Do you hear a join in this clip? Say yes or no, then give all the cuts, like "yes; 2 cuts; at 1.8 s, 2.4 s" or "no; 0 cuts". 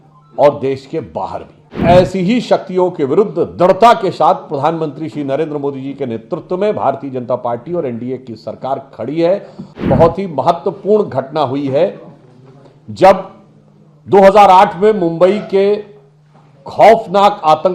yes; 2 cuts; at 1.8 s, 9.8 s